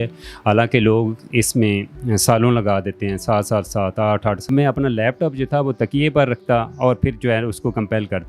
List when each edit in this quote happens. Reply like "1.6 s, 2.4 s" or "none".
4.5 s